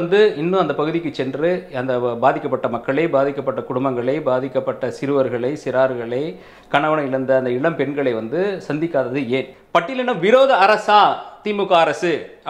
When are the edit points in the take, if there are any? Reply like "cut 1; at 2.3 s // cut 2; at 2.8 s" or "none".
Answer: cut 1; at 9.6 s